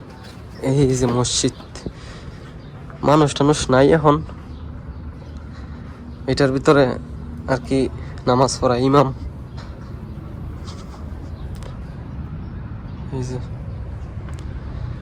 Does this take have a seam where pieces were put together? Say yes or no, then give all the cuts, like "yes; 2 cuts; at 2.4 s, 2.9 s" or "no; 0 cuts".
no; 0 cuts